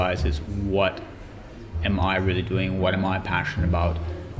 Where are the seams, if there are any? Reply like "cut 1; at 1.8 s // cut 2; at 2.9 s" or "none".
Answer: none